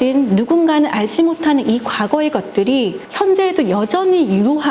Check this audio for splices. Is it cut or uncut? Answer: cut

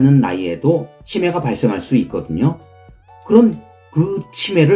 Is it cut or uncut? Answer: cut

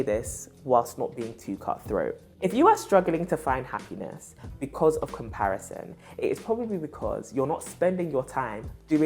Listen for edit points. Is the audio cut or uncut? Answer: uncut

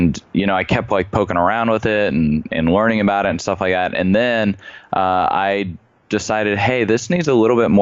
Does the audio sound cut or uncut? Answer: cut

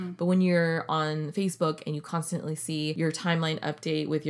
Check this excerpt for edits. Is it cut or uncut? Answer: cut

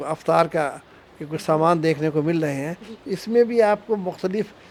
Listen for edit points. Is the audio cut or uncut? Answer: uncut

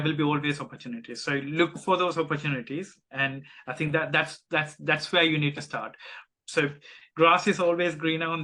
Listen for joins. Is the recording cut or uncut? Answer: uncut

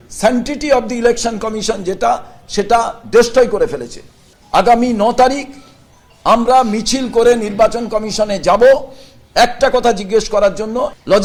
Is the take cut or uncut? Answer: uncut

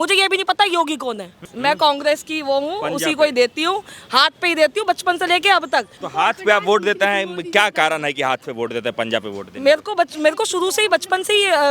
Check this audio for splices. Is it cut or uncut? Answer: cut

